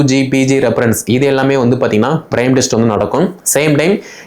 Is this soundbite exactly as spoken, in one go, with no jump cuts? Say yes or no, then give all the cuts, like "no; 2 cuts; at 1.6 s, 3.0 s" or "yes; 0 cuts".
yes; 0 cuts